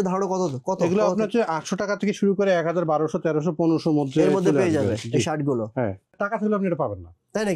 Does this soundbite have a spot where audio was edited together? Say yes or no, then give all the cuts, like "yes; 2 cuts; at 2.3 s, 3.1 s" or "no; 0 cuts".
yes; 1 cut; at 6.2 s